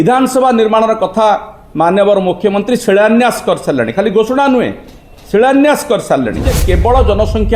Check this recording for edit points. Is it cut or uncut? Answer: cut